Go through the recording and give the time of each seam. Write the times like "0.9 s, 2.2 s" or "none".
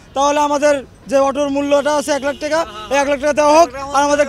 none